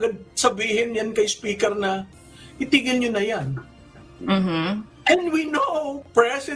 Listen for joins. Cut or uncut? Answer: cut